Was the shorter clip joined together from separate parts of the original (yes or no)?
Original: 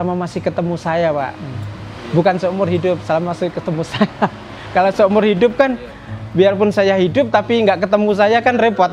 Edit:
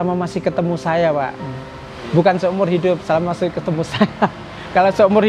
no